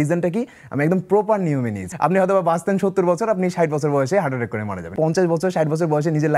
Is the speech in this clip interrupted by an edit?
yes; 2 cuts; at 1.9 s, 4.9 s

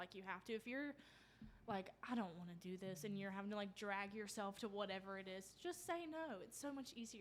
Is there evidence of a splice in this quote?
no; 0 cuts

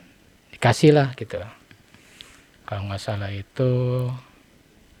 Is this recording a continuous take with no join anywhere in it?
yes; 0 cuts

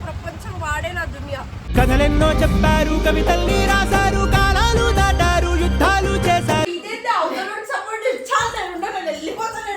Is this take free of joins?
no; 1 cut; at 6.7 s

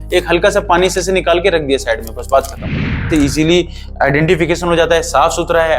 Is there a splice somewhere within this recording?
yes; 1 cut; at 3.1 s

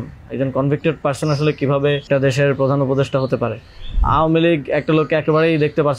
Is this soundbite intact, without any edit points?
no; 2 cuts; at 2.0 s, 4.0 s

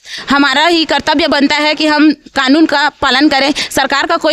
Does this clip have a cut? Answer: no; 0 cuts

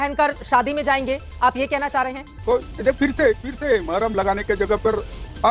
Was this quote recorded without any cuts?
no; 1 cut; at 2.4 s

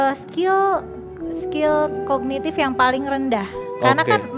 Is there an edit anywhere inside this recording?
no; 0 cuts

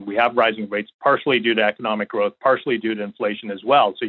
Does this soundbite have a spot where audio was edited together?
yes; 1 cut; at 1.0 s

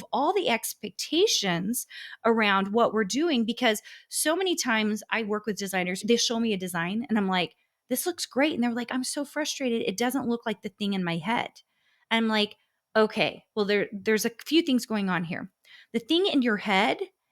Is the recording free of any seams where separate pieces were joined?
no; 1 cut; at 6.0 s

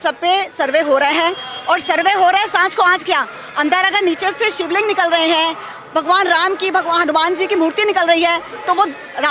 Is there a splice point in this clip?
no; 0 cuts

